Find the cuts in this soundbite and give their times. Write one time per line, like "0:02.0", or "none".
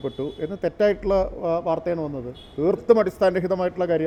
none